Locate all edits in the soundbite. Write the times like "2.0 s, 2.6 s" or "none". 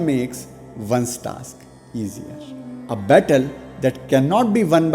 2.8 s

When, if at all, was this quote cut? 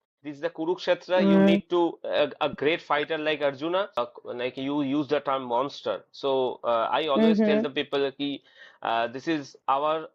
4.0 s

